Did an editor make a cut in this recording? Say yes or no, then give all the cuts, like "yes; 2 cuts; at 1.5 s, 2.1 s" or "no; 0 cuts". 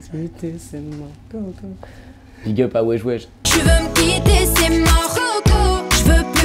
no; 0 cuts